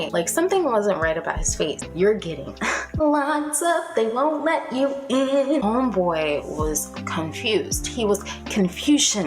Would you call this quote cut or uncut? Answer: cut